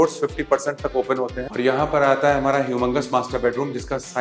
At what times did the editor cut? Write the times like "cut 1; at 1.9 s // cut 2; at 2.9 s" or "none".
cut 1; at 1.4 s